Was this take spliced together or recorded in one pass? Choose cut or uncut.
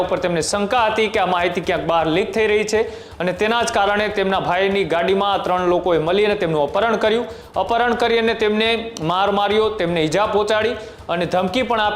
uncut